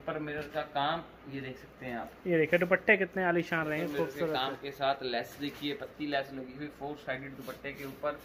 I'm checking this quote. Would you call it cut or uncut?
uncut